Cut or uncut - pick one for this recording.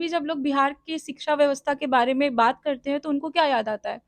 uncut